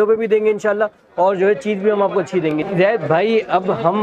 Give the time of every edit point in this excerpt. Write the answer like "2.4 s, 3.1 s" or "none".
2.6 s